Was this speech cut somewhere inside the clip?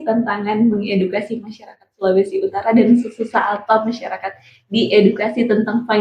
no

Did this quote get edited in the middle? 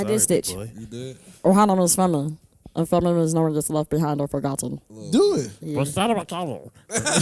yes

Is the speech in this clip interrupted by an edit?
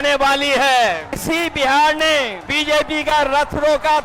yes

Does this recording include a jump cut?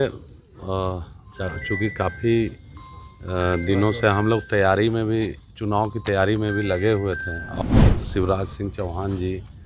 yes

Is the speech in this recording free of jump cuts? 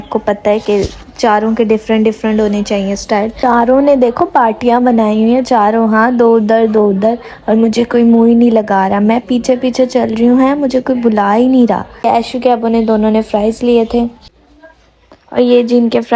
no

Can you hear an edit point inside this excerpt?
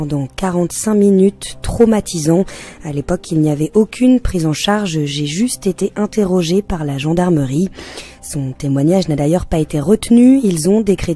yes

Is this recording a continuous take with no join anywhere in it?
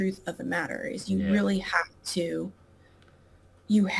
yes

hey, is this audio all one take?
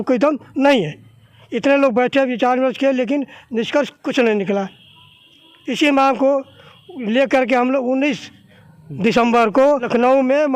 yes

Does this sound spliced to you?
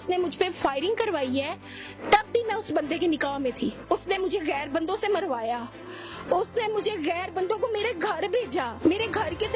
yes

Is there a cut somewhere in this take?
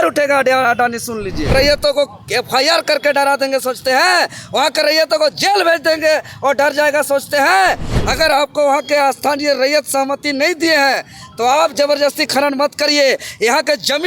yes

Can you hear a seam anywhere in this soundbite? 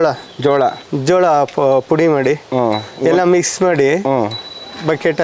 no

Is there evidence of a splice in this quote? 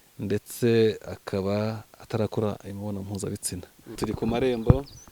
yes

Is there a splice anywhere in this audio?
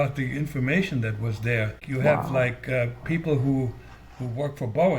yes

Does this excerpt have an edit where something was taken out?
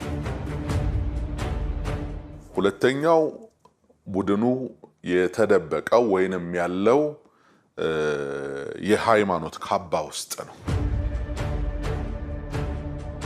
no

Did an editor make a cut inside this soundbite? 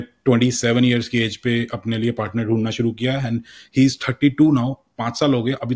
no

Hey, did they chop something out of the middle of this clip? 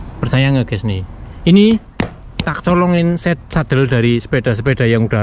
no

